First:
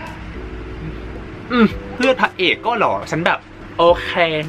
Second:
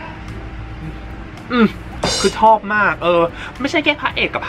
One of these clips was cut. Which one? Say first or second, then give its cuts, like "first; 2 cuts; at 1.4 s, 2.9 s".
first; 2 cuts; at 1.9 s, 3.6 s